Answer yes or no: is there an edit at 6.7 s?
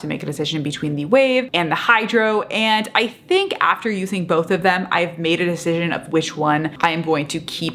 yes